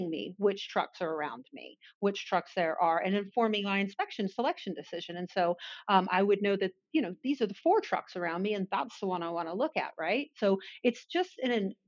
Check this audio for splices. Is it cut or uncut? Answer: uncut